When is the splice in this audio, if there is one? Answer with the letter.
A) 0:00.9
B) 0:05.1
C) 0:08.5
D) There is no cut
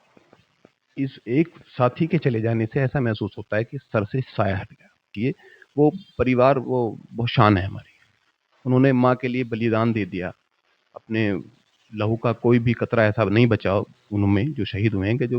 B